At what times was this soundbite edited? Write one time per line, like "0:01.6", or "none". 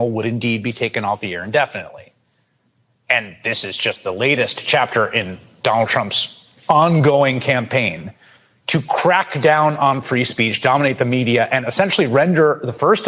none